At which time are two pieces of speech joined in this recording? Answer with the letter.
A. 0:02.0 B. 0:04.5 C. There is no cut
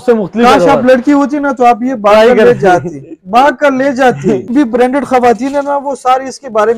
B